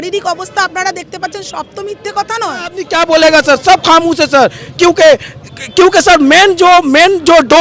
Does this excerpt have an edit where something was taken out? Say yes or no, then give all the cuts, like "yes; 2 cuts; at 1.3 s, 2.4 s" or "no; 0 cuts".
yes; 1 cut; at 2.8 s